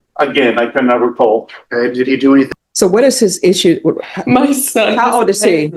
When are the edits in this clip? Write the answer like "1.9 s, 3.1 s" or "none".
2.5 s